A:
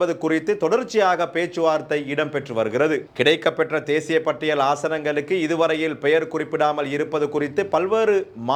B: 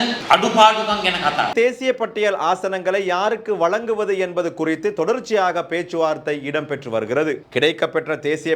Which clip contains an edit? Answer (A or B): B